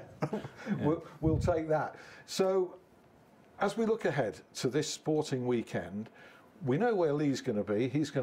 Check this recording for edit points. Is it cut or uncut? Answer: uncut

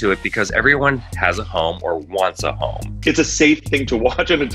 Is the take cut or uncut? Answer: cut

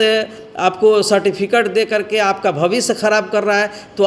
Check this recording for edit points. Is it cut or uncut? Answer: uncut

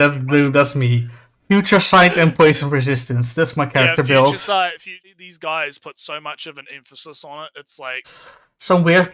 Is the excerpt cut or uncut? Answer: cut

